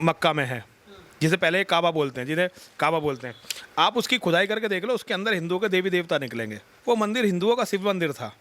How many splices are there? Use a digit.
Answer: 1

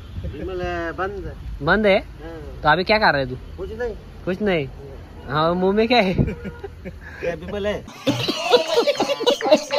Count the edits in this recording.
1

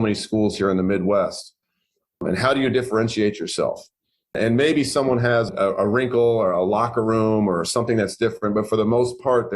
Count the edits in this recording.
3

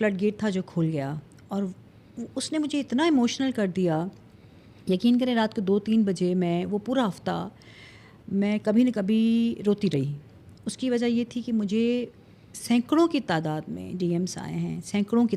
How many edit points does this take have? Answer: 0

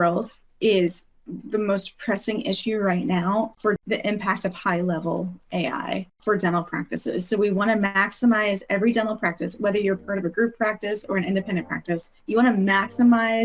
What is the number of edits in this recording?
3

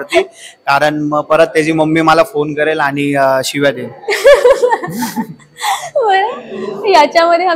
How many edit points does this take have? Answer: 0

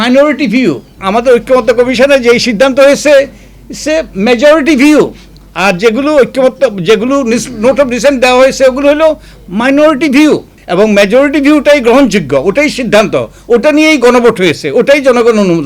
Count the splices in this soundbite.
2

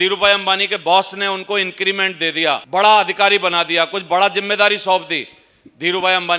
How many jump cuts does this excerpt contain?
1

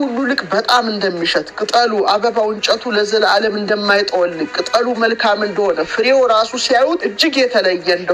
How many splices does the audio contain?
1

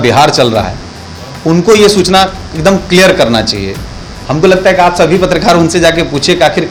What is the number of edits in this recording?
0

